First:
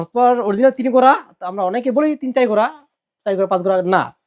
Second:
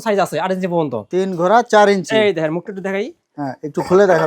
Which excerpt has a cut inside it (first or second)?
second